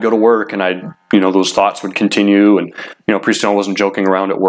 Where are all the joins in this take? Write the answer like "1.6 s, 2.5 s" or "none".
none